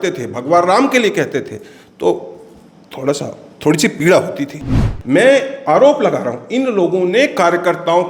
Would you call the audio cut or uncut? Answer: cut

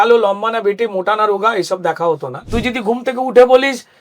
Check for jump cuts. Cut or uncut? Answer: cut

